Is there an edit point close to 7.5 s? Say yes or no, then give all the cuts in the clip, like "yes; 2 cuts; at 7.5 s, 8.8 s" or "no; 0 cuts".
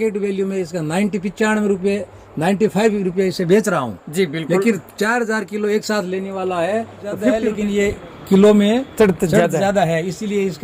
yes; 1 cut; at 7.5 s